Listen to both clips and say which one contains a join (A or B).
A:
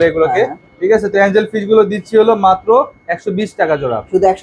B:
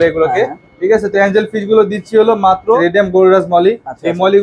B